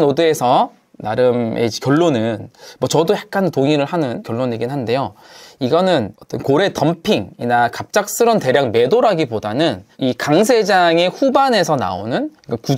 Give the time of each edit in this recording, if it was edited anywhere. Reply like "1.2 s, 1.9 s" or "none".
none